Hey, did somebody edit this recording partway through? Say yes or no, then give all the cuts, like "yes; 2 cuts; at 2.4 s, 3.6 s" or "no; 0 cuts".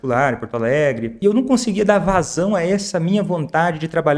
yes; 1 cut; at 1.2 s